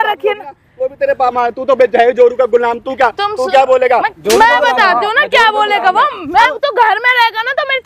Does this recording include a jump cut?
yes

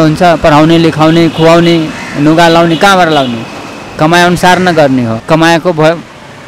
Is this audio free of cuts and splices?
no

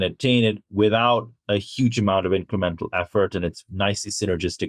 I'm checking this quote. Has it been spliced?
no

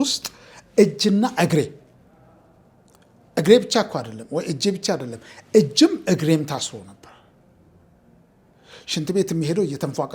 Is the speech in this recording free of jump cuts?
yes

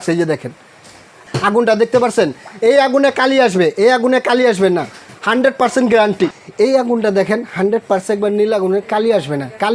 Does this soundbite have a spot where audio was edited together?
yes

